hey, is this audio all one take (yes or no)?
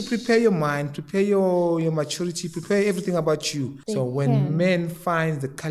no